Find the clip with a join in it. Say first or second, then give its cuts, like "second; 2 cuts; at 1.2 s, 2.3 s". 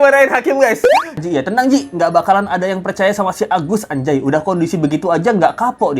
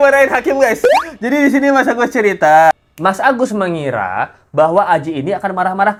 first; 1 cut; at 1.2 s